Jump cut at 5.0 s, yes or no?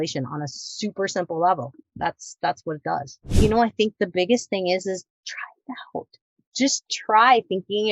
no